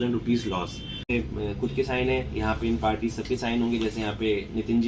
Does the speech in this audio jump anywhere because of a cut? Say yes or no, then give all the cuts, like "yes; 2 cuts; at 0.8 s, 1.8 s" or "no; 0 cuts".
yes; 1 cut; at 1.1 s